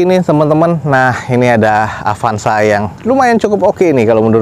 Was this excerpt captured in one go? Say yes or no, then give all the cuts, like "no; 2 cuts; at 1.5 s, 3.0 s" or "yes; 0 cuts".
yes; 0 cuts